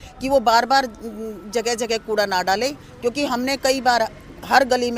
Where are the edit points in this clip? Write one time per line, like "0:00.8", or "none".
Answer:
none